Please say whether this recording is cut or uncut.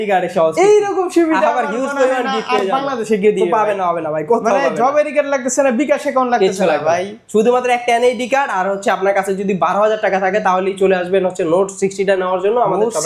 uncut